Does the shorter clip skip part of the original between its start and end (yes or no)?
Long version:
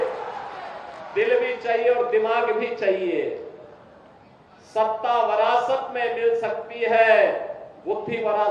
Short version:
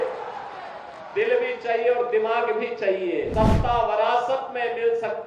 yes